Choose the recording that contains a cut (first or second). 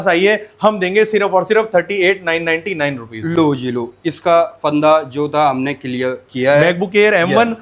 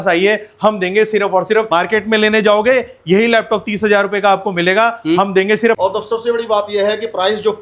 second